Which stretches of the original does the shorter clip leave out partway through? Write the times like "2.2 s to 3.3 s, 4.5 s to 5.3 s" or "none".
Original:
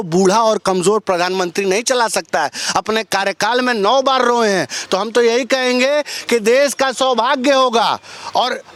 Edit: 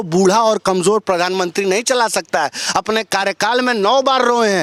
none